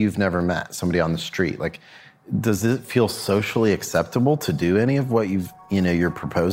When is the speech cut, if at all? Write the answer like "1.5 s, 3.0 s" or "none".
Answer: 2.2 s